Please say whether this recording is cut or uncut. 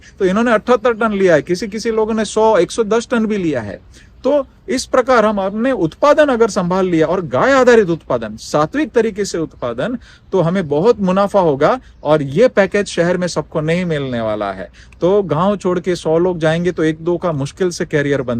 uncut